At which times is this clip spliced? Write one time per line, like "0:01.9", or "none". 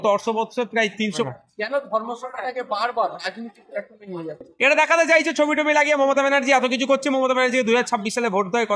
0:01.2